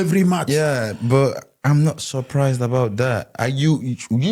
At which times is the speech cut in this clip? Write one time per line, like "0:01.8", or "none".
none